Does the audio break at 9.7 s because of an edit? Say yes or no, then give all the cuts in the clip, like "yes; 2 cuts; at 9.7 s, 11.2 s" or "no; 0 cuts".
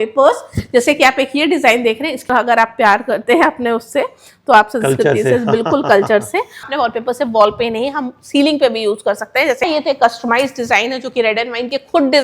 yes; 3 cuts; at 2.3 s, 6.7 s, 9.7 s